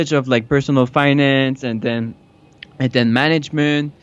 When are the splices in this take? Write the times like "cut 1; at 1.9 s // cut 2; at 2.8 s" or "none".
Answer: none